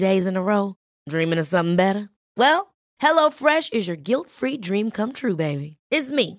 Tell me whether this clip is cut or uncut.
uncut